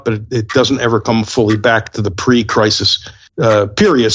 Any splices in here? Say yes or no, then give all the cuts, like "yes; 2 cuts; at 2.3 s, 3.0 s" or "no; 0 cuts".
no; 0 cuts